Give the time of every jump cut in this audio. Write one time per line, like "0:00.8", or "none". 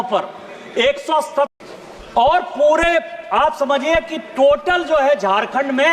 0:01.5